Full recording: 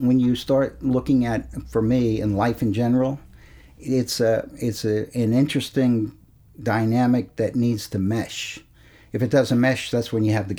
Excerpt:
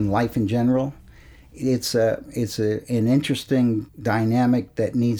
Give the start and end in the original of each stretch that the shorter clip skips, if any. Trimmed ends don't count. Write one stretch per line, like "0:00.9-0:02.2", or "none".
0:06.2-0:06.5